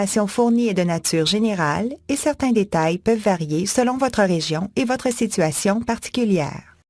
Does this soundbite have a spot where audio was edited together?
yes; 1 cut; at 5.1 s

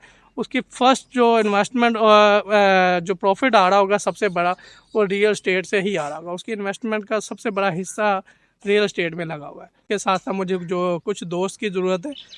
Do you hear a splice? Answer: yes; 1 cut; at 9.8 s

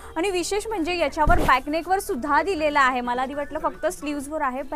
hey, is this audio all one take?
yes; 0 cuts

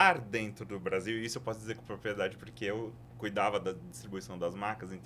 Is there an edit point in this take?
yes; 1 cut; at 3.0 s

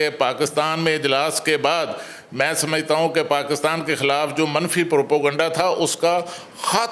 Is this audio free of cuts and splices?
yes; 0 cuts

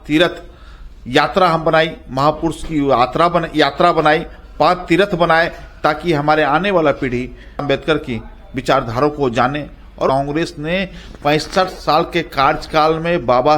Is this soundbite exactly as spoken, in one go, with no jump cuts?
no; 2 cuts; at 7.6 s, 10.1 s

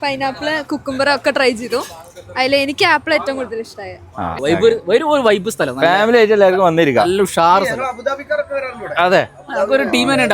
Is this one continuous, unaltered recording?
no; 1 cut; at 4.4 s

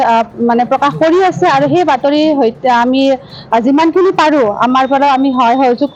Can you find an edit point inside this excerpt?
no; 0 cuts

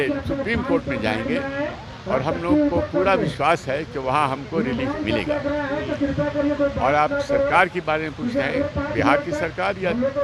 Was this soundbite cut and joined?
no; 0 cuts

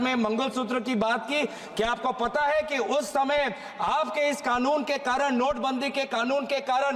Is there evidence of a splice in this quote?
no; 0 cuts

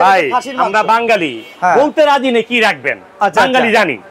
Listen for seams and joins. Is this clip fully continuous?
yes; 0 cuts

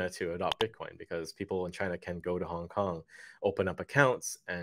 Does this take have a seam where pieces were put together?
no; 0 cuts

